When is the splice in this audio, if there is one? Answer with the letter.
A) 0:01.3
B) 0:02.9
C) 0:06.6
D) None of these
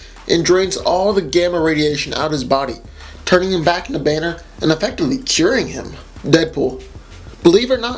C